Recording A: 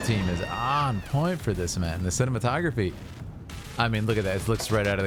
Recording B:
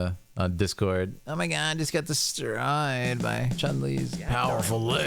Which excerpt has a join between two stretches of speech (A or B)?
B